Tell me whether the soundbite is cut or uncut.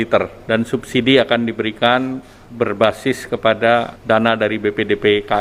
uncut